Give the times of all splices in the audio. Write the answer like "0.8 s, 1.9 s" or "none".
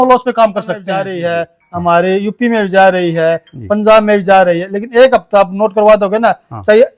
1.1 s